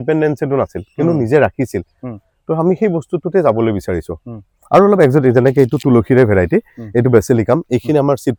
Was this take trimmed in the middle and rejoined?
no; 0 cuts

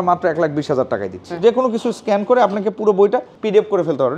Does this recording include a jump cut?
yes; 1 cut; at 1.4 s

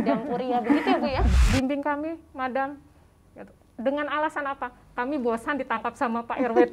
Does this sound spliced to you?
yes; 1 cut; at 1.3 s

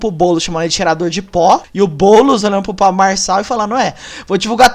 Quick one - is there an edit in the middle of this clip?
yes; 2 cuts; at 1.7 s, 2.4 s

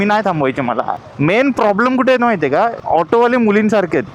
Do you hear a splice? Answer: yes; 2 cuts; at 1.0 s, 2.8 s

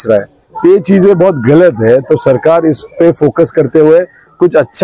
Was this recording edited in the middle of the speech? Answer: no; 0 cuts

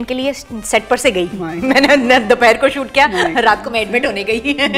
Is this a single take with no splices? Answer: yes; 0 cuts

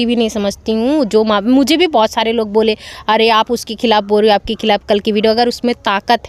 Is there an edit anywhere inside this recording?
no; 0 cuts

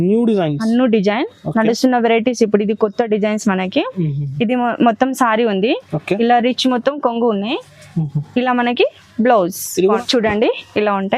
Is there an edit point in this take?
yes; 1 cut; at 10.0 s

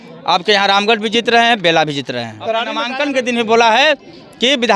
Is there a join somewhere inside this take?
yes; 1 cut; at 2.8 s

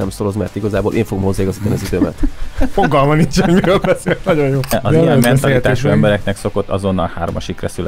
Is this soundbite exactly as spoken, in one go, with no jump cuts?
no; 1 cut; at 4.8 s

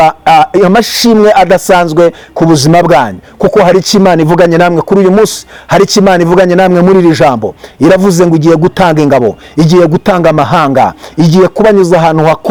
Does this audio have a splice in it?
no; 0 cuts

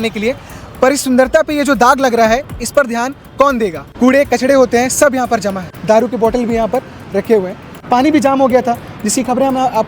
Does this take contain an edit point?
yes; 3 cuts; at 3.9 s, 5.7 s, 7.8 s

